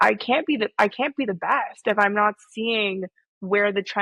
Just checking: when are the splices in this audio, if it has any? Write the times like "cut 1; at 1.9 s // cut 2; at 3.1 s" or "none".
none